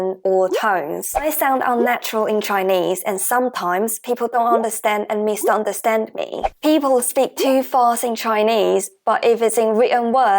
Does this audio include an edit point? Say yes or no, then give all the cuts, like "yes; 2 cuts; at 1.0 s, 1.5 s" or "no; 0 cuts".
yes; 2 cuts; at 1.2 s, 6.4 s